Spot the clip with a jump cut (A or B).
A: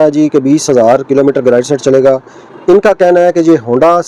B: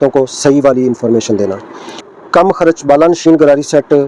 B